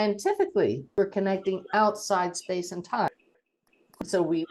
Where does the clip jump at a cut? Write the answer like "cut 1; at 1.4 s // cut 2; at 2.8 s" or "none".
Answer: cut 1; at 0.9 s

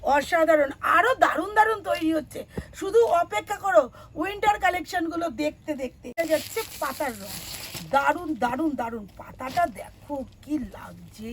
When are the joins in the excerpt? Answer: cut 1; at 6.1 s

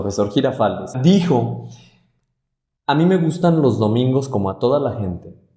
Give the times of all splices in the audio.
cut 1; at 0.9 s

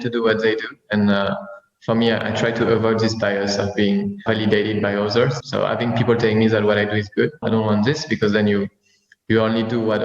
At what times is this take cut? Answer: cut 1; at 4.2 s // cut 2; at 5.4 s // cut 3; at 7.4 s

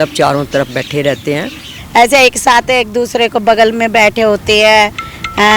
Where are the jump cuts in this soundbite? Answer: cut 1; at 1.7 s

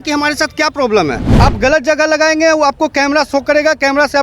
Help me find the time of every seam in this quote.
cut 1; at 1.2 s

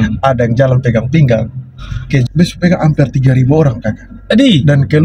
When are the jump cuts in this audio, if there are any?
cut 1; at 2.2 s

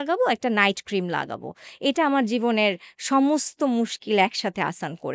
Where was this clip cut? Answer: none

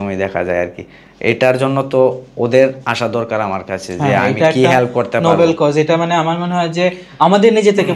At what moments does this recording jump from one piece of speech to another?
none

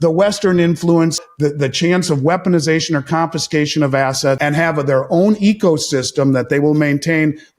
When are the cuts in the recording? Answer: cut 1; at 1.3 s // cut 2; at 4.4 s

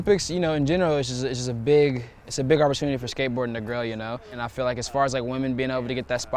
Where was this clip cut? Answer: cut 1; at 4.4 s

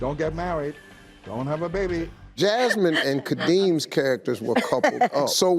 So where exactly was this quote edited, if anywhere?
cut 1; at 2.1 s

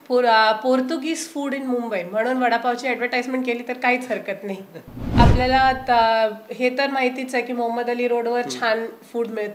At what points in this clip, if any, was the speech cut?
cut 1; at 5.0 s

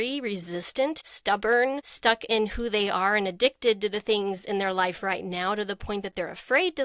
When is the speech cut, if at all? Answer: cut 1; at 1.1 s // cut 2; at 1.9 s

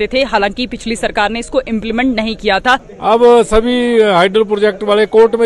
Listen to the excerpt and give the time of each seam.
cut 1; at 2.9 s

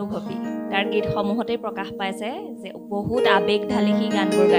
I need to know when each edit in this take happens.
none

